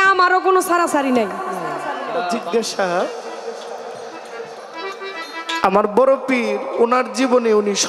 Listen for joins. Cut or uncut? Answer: cut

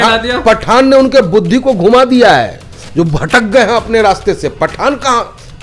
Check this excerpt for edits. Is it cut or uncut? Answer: uncut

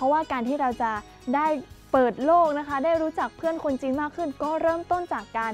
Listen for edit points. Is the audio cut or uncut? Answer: uncut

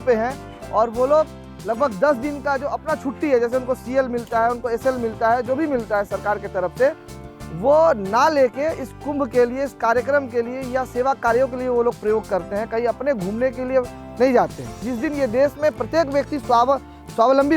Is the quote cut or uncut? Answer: cut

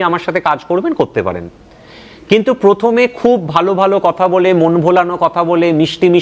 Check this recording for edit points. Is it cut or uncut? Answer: uncut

